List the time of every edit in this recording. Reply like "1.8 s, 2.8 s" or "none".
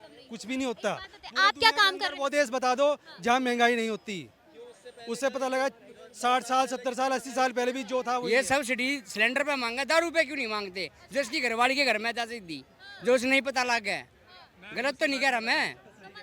8.2 s